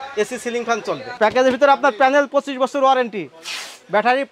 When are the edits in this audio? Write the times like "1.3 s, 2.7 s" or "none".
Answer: 1.1 s